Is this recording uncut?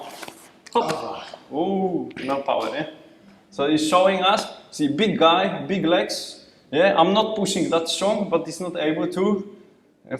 yes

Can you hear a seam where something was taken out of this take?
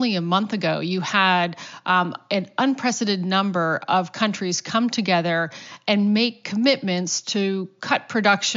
no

